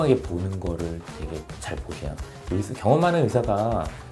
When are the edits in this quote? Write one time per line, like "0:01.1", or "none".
0:02.3